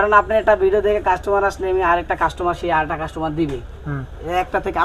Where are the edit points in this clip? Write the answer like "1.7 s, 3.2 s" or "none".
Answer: none